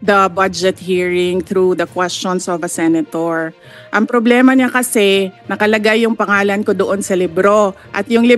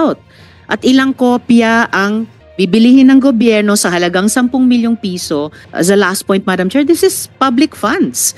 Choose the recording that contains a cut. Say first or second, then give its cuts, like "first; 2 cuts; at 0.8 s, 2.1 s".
second; 1 cut; at 5.6 s